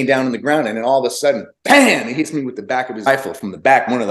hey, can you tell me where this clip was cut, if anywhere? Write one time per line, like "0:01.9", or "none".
0:03.1